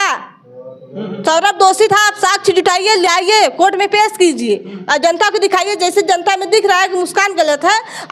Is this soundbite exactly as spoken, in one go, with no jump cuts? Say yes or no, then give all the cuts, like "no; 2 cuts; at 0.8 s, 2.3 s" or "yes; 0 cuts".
yes; 0 cuts